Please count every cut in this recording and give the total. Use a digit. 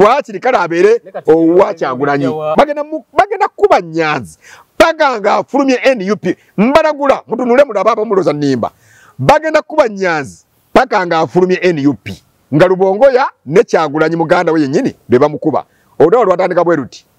1